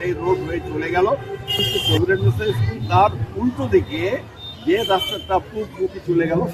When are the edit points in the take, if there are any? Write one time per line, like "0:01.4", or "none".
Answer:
0:01.7